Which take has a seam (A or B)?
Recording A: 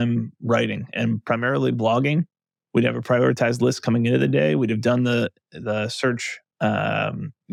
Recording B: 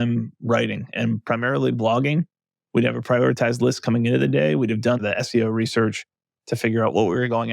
B